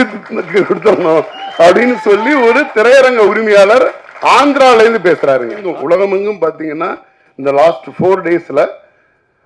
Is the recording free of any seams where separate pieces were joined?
no; 1 cut; at 5.7 s

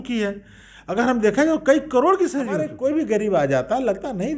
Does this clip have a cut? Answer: yes; 1 cut; at 2.7 s

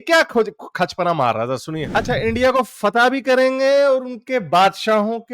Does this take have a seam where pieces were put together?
yes; 1 cut; at 1.9 s

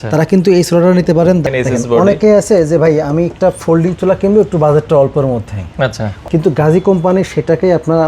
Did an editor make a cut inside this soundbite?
yes; 2 cuts; at 1.4 s, 6.2 s

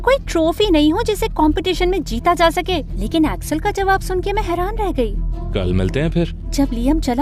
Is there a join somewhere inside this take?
no; 0 cuts

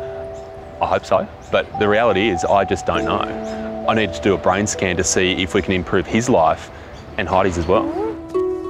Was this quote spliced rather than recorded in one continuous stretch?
no; 0 cuts

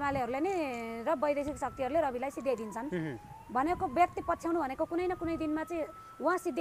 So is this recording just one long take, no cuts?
yes; 0 cuts

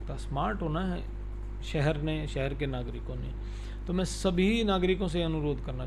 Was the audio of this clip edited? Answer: no; 0 cuts

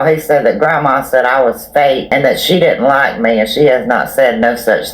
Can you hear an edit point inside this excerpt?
yes; 1 cut; at 2.0 s

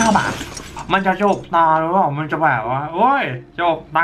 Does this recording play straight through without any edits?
yes; 0 cuts

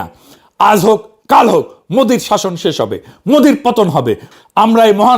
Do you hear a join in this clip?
yes; 1 cut; at 4.3 s

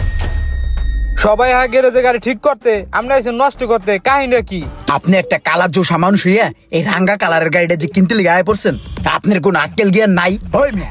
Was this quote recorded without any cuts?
no; 2 cuts; at 4.8 s, 10.0 s

